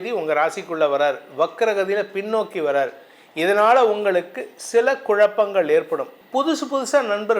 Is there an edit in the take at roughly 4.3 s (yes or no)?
no